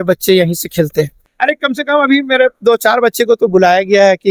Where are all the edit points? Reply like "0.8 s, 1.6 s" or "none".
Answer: 1.2 s